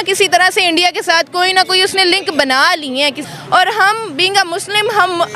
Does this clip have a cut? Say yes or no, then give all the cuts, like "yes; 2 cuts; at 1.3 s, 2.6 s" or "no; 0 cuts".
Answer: yes; 1 cut; at 3.3 s